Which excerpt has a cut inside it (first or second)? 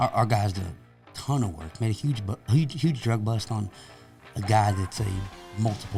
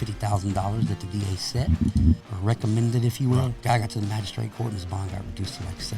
second